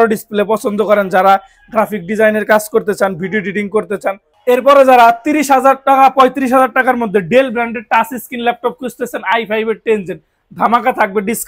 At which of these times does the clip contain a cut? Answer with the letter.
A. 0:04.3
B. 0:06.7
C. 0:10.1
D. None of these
A